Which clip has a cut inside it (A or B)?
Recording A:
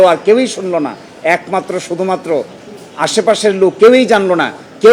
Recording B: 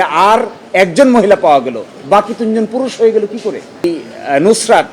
B